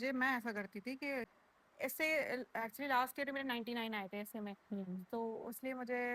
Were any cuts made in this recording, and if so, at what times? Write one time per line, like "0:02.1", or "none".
0:01.3